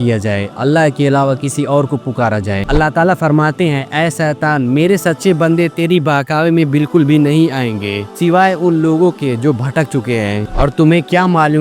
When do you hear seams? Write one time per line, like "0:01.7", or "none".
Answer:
0:02.6
0:10.5